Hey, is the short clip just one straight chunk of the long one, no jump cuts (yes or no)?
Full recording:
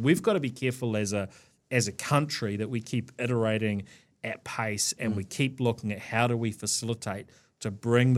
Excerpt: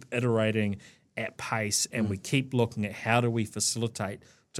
yes